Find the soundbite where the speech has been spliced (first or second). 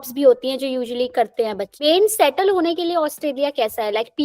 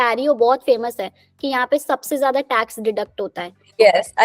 first